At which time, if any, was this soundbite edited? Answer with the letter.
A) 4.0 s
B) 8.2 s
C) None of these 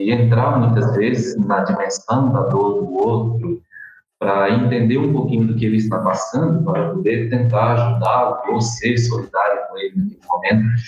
C